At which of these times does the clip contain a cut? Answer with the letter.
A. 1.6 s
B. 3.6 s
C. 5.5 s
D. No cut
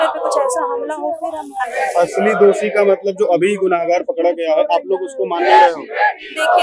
A